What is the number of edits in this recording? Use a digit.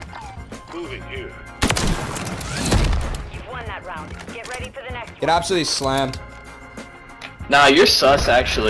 0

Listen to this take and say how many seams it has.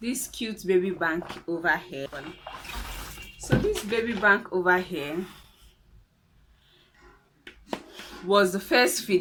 0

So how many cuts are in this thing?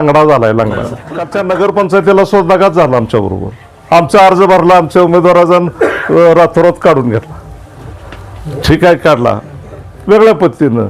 1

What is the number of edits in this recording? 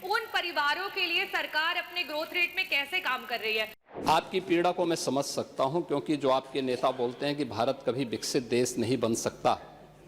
1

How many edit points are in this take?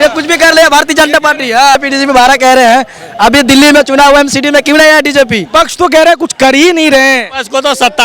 2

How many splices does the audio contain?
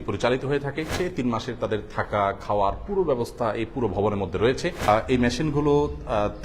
2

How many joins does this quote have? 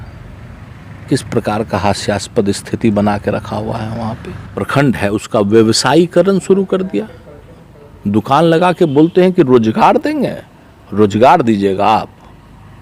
1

